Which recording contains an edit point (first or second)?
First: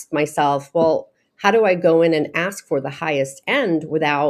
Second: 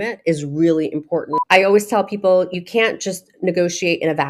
second